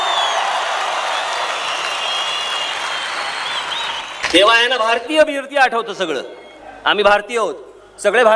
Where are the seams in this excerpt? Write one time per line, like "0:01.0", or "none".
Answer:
none